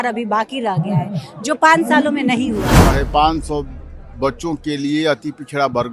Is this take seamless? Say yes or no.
no